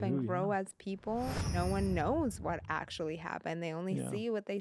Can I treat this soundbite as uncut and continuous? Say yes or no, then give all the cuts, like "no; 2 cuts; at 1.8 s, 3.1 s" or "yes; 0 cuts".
no; 1 cut; at 1.3 s